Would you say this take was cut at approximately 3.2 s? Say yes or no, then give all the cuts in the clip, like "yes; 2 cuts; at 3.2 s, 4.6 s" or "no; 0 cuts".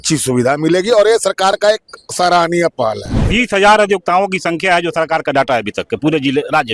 yes; 1 cut; at 3.2 s